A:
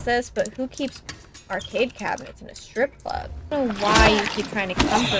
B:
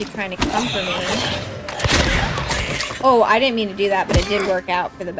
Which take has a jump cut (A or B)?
A